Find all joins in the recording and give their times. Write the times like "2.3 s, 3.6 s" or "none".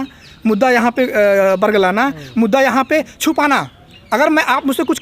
none